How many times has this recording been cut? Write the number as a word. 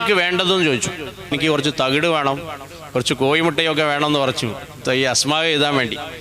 one